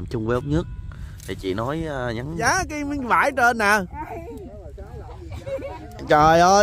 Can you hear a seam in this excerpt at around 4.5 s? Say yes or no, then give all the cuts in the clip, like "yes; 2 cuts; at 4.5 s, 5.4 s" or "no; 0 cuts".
no; 1 cut; at 2.4 s